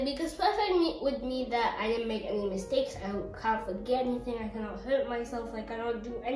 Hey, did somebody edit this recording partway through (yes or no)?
no